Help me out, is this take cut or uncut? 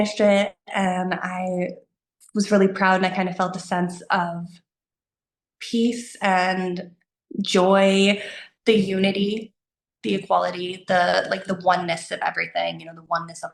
cut